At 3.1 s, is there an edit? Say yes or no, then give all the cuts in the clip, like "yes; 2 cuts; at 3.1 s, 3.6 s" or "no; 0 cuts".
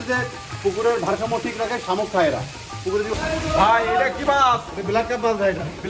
yes; 1 cut; at 3.1 s